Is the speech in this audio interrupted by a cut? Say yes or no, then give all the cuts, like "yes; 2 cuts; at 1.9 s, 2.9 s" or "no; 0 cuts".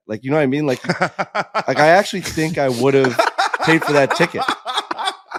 no; 0 cuts